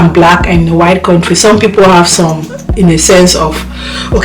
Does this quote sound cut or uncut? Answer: cut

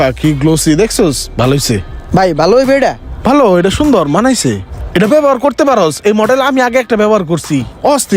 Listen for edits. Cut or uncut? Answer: cut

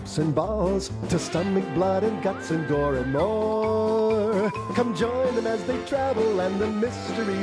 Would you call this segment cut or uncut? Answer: cut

